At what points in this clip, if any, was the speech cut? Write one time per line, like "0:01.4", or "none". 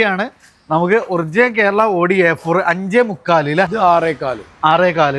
0:03.7